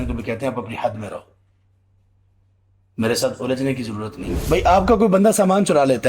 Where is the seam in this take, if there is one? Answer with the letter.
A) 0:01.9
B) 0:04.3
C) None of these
B